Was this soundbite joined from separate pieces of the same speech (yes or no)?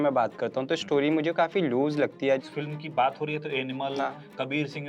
yes